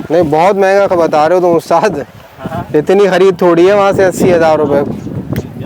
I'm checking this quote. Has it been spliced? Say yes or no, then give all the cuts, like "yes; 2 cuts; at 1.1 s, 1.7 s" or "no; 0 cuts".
no; 0 cuts